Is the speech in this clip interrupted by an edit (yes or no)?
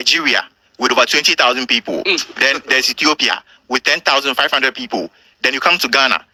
no